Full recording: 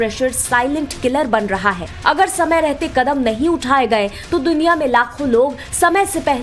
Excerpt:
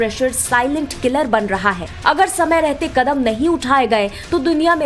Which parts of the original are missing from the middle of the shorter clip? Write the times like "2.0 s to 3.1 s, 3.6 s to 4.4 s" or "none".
none